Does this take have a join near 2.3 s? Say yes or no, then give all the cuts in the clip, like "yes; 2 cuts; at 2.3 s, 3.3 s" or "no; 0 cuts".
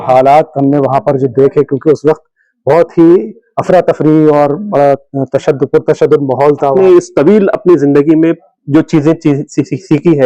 no; 1 cut; at 6.7 s